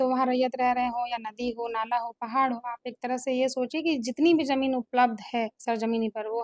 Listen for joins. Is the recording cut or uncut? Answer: uncut